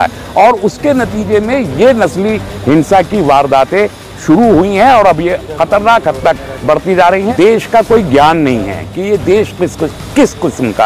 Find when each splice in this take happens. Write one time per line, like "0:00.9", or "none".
0:07.3